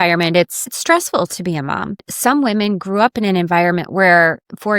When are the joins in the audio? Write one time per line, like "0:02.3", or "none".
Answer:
0:02.1